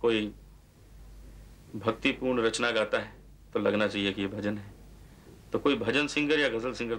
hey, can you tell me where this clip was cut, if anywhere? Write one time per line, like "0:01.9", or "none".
none